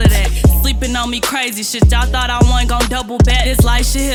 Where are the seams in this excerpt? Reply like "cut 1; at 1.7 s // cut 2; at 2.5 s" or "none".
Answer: none